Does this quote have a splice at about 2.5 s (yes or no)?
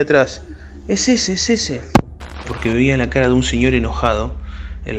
yes